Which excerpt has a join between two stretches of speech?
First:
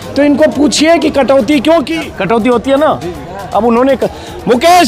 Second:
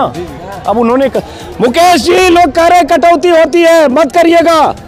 first; 1 cut; at 1.9 s

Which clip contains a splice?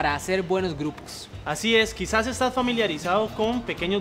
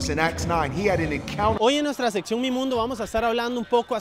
second; 1 cut; at 1.6 s

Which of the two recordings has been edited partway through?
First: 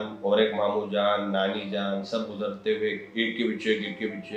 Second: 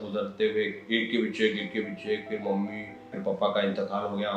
second; 1 cut; at 3.2 s

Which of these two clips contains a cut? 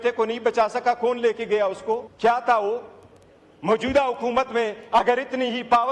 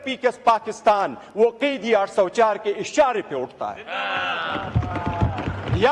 first; 1 cut; at 2.1 s

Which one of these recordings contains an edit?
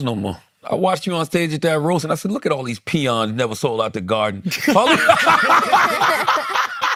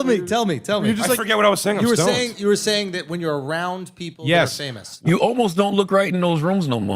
second; 1 cut; at 5.1 s

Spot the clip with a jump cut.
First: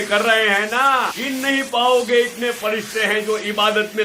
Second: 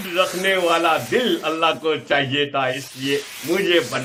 first; 1 cut; at 1.2 s

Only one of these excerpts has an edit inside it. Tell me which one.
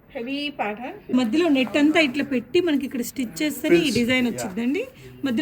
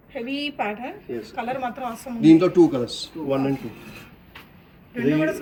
first; 1 cut; at 1.1 s

